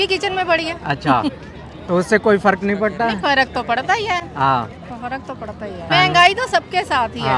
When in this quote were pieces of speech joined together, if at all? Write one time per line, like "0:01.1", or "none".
none